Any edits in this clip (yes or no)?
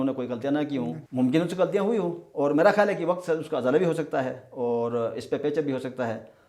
yes